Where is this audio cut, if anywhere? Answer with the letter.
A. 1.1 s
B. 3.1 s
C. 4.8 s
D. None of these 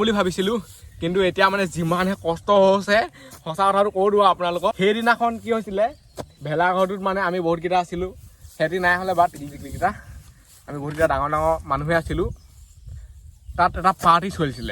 C